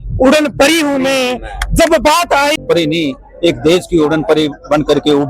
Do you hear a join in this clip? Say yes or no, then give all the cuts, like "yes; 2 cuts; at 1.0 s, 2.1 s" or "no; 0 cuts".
yes; 1 cut; at 2.6 s